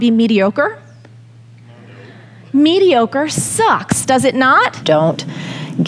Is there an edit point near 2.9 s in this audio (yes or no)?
no